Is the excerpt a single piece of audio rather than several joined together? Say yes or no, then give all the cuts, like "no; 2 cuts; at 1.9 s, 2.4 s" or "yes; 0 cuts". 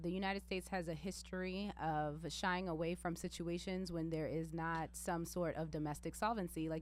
yes; 0 cuts